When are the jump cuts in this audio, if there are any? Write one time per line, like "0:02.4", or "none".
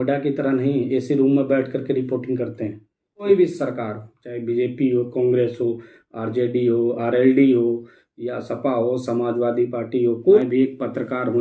0:03.2
0:10.4